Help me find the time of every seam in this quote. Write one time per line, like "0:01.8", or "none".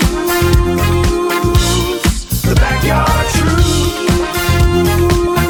none